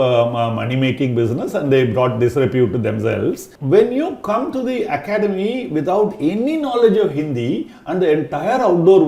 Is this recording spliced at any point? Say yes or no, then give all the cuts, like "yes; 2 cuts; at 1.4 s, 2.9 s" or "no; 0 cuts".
yes; 1 cut; at 3.5 s